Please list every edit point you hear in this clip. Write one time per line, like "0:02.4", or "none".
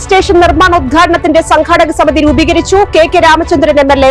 none